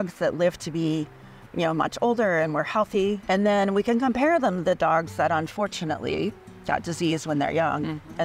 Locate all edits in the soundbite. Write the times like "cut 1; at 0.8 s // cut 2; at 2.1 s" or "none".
cut 1; at 3.2 s

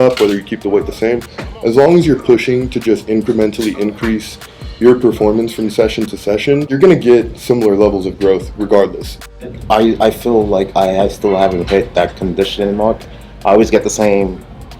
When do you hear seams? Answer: cut 1; at 6.7 s // cut 2; at 9.1 s

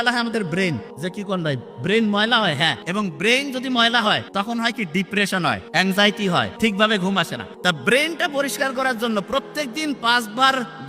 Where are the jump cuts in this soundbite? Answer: cut 1; at 0.9 s // cut 2; at 2.8 s // cut 3; at 4.3 s // cut 4; at 5.6 s // cut 5; at 6.5 s // cut 6; at 7.4 s

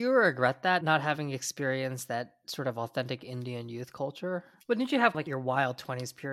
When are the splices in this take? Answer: cut 1; at 0.8 s // cut 2; at 4.5 s // cut 3; at 5.3 s

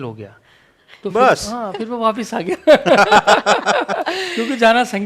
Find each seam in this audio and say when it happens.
none

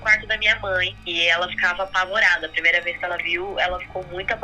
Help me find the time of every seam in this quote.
cut 1; at 1.0 s

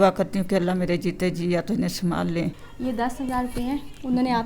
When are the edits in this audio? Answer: cut 1; at 2.7 s

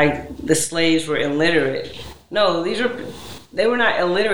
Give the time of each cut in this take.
none

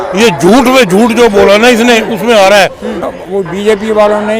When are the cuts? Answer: cut 1; at 3.0 s

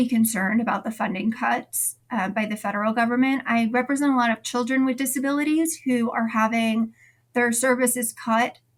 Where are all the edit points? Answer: none

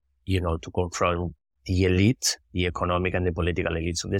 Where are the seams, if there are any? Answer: none

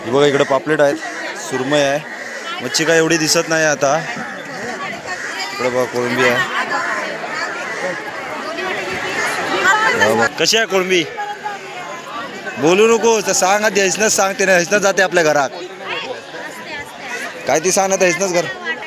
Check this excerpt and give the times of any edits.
cut 1; at 10.3 s

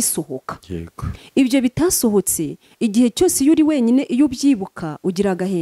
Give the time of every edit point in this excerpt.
none

